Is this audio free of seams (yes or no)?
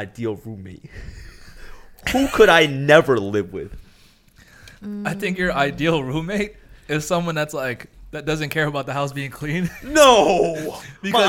yes